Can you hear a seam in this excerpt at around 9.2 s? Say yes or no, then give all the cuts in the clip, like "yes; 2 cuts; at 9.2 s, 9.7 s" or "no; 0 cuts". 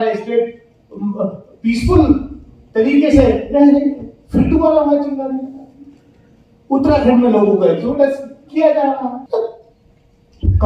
yes; 1 cut; at 9.2 s